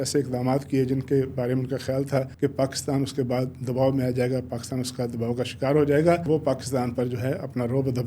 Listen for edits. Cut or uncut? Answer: cut